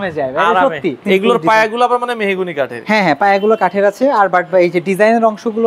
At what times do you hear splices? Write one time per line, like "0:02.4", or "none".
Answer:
0:01.0